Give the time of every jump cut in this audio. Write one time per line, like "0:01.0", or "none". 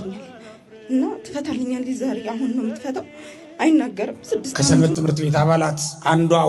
0:04.8